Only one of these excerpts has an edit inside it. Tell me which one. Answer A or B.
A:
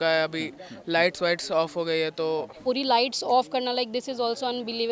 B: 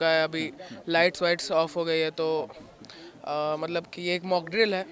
A